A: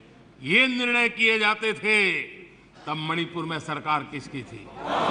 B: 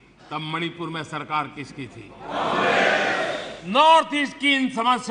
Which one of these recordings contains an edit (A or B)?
B